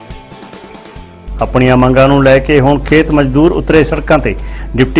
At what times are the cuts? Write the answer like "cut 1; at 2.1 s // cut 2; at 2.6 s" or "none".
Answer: cut 1; at 1.2 s